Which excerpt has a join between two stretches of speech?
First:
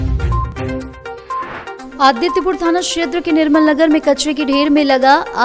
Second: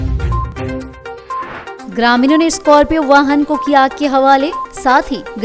first; 1 cut; at 1.7 s

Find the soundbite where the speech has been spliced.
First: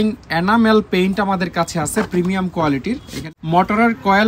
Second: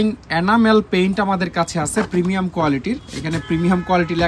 first; 1 cut; at 3.1 s

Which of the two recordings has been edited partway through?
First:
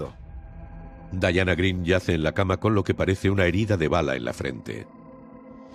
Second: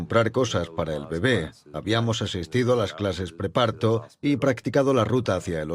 second; 1 cut; at 1.7 s

